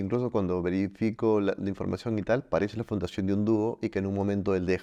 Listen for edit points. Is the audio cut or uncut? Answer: uncut